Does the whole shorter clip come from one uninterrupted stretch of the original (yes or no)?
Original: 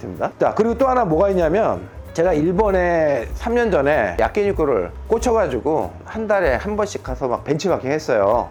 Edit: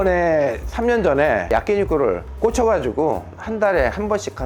yes